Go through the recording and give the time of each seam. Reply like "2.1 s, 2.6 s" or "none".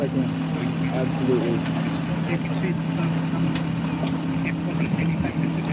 none